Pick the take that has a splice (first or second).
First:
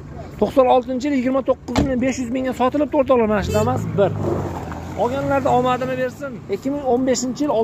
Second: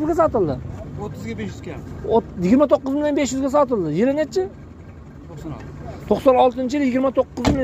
first